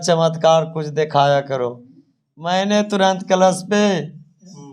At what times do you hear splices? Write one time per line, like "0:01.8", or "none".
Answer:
none